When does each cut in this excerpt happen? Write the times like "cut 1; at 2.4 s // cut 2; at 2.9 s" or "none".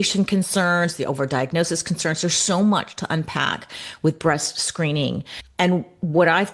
none